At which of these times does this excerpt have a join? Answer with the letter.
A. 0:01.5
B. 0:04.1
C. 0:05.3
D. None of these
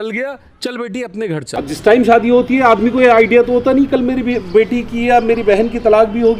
A